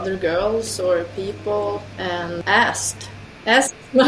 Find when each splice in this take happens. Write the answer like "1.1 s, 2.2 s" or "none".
2.0 s

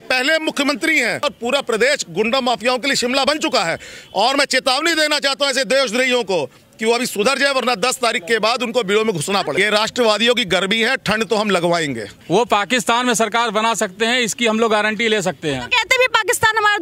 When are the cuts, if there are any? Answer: 1.2 s, 9.5 s, 12.1 s

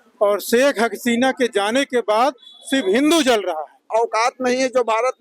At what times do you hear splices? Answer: 3.8 s

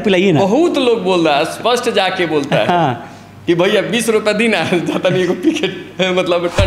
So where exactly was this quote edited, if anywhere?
none

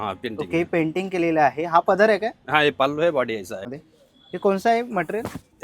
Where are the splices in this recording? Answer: 3.6 s

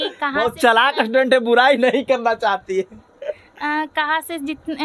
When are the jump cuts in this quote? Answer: none

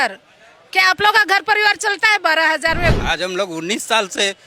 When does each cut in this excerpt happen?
2.9 s

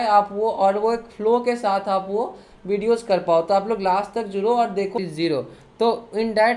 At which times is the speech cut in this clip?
4.9 s

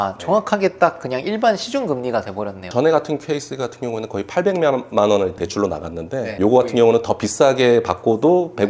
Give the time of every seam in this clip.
2.6 s, 5.3 s

